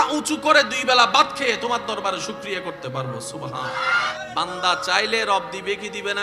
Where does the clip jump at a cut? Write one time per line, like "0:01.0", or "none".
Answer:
0:04.2